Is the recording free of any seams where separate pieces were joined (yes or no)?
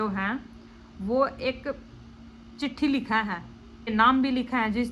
no